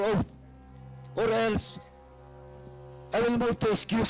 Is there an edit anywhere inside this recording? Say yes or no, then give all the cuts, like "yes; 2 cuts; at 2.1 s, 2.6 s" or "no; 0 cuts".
yes; 2 cuts; at 1.8 s, 3.1 s